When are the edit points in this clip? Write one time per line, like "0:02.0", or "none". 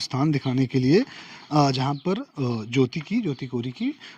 none